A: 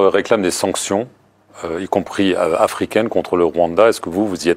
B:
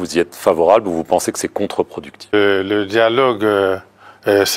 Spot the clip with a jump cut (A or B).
B